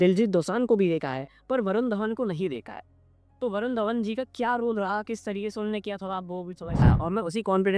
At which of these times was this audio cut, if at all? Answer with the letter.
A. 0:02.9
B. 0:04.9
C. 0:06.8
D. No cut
C